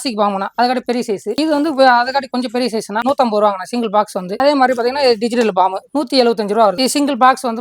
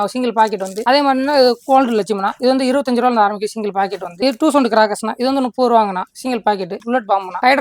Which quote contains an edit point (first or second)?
first